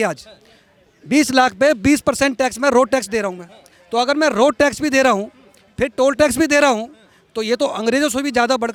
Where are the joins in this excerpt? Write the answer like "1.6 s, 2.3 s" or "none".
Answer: none